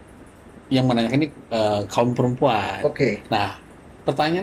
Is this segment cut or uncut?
uncut